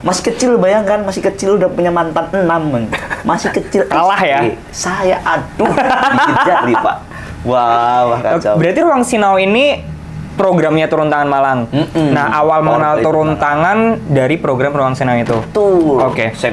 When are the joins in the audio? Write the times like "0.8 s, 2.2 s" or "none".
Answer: none